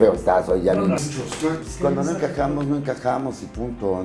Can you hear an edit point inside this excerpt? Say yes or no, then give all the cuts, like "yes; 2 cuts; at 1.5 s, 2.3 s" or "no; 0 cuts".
yes; 1 cut; at 1.0 s